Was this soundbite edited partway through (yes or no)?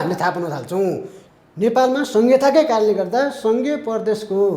yes